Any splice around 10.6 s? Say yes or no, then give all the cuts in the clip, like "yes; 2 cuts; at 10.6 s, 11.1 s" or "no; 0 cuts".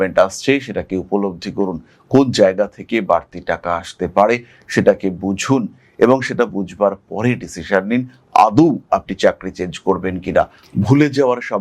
yes; 1 cut; at 10.6 s